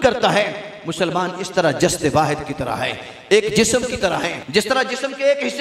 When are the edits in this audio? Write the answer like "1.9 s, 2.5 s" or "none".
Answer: 4.4 s